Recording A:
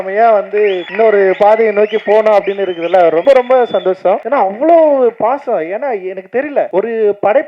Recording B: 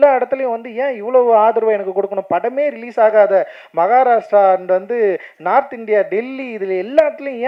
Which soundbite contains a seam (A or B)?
A